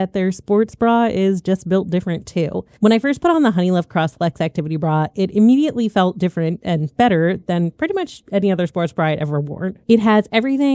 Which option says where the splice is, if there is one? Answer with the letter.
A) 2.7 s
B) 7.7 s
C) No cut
C